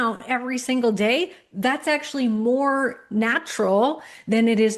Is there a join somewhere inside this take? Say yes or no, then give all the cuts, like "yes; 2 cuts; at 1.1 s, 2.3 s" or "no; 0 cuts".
no; 0 cuts